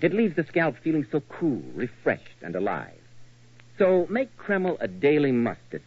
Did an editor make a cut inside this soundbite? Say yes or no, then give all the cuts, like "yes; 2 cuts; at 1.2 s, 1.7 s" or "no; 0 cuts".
no; 0 cuts